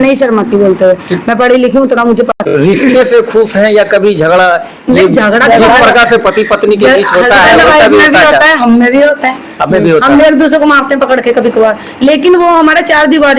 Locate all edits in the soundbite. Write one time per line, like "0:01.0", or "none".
0:02.4

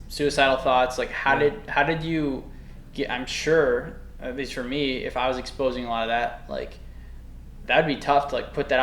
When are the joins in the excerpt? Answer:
none

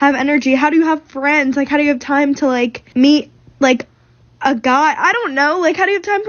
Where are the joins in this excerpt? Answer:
0:02.8

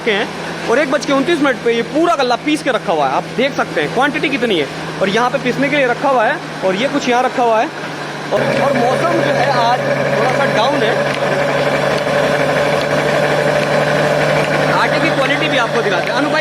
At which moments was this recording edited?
0:08.4

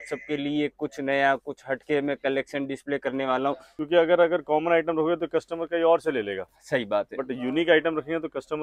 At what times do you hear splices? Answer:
0:03.7

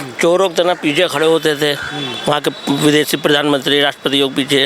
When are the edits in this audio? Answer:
none

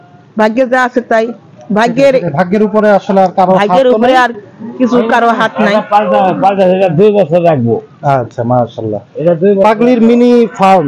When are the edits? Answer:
none

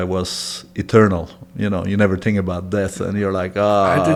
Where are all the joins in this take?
none

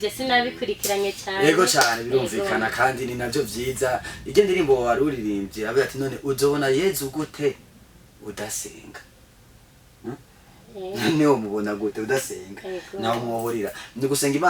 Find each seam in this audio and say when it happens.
none

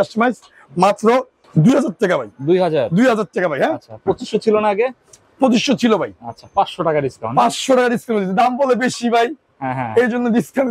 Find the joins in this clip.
none

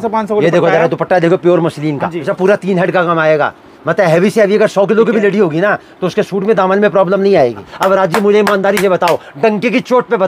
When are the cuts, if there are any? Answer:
0:02.3
0:07.7

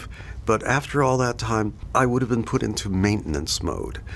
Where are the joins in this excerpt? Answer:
0:01.8

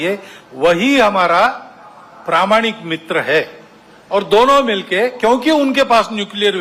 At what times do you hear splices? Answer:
none

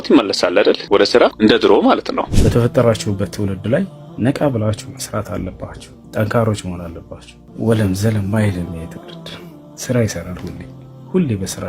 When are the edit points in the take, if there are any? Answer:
0:02.3

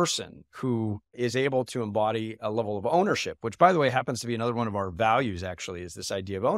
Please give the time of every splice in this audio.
0:01.0

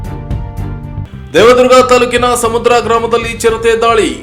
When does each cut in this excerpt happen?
0:01.1

